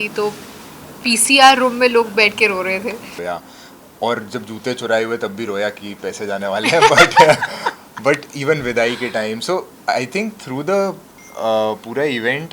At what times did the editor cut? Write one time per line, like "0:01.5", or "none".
0:03.2